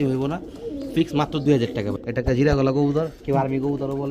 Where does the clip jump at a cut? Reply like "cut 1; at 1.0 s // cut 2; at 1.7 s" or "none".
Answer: cut 1; at 1.9 s